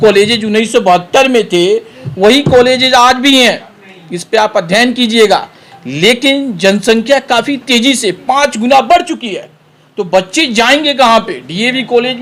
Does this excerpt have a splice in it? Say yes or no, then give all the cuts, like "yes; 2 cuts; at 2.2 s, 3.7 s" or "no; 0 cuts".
no; 0 cuts